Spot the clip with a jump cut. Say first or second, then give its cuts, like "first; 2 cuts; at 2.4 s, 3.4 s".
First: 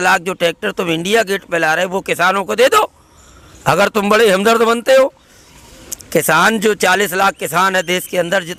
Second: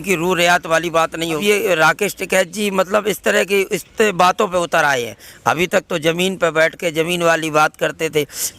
second; 1 cut; at 1.4 s